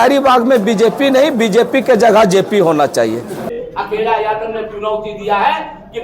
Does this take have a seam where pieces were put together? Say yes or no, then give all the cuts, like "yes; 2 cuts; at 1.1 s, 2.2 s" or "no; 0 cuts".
yes; 1 cut; at 3.5 s